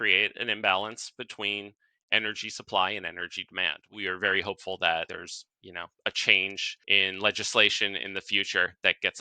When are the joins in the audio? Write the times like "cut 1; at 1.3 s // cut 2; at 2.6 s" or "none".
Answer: cut 1; at 3.8 s // cut 2; at 5.1 s // cut 3; at 6.7 s